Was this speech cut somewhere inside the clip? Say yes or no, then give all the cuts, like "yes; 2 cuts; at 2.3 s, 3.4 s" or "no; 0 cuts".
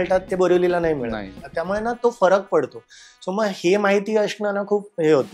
no; 0 cuts